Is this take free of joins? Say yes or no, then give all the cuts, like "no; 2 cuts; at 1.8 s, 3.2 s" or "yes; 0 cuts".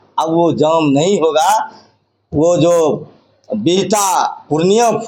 yes; 0 cuts